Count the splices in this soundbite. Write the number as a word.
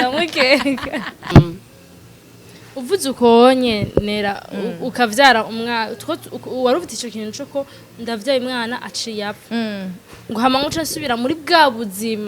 one